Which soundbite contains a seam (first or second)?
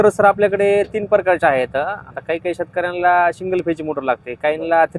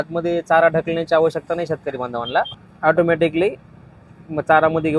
second